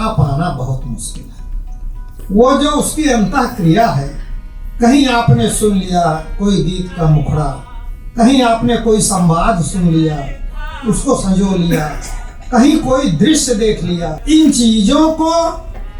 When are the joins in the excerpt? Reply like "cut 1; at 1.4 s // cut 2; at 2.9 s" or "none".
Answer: cut 1; at 14.1 s